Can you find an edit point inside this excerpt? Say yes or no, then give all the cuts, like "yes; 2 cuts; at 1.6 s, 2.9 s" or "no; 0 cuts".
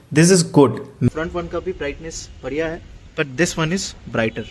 yes; 1 cut; at 1.1 s